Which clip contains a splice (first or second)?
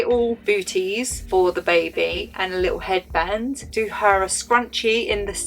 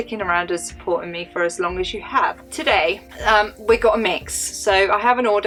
first